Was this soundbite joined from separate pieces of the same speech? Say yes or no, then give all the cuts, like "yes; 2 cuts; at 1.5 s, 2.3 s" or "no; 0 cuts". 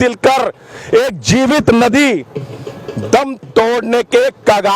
no; 0 cuts